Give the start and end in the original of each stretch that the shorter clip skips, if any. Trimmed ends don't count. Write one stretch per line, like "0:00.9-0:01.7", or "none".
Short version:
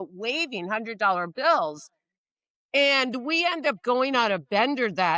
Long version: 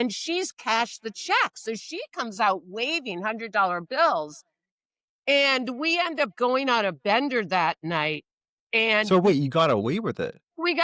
none